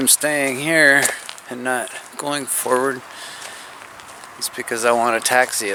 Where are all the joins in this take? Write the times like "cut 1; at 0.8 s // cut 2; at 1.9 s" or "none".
none